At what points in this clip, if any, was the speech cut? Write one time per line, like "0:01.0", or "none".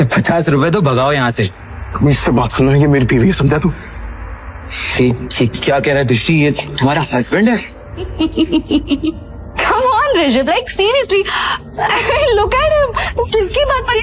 0:08.1